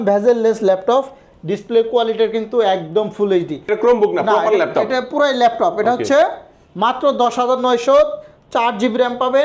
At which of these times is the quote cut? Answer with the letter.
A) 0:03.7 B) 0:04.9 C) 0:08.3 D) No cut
A